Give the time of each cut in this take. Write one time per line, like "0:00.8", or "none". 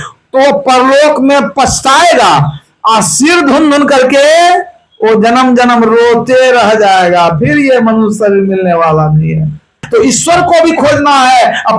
0:09.8